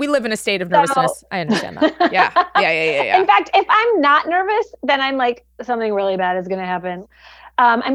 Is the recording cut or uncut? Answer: cut